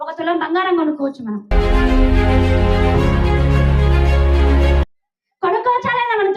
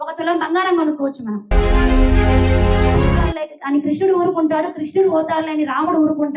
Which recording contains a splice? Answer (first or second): second